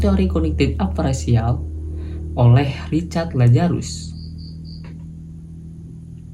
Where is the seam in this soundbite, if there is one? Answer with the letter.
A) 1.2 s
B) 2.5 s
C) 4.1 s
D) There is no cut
D